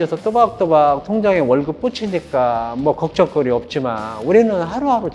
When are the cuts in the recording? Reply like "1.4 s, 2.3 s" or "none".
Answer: none